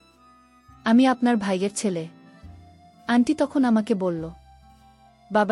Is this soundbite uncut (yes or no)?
no